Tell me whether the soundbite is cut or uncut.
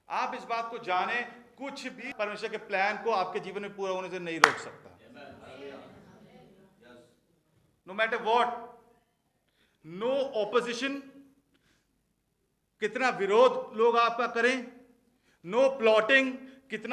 cut